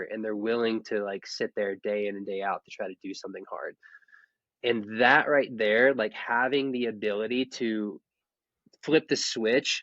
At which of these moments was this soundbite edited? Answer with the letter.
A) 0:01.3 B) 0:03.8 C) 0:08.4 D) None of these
B